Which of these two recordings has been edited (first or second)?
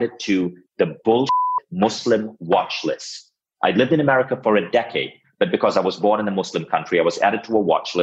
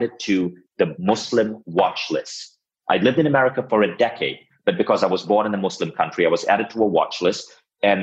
second